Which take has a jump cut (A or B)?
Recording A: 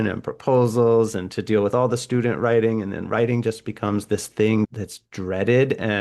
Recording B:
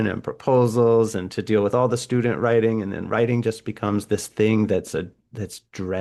A